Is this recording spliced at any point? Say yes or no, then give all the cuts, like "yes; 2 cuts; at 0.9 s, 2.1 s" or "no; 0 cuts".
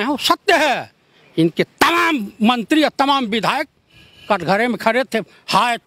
no; 0 cuts